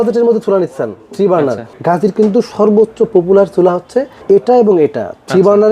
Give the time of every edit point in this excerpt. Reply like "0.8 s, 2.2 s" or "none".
1.7 s